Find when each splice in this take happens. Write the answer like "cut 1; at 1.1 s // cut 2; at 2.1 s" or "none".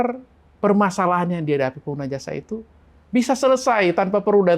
none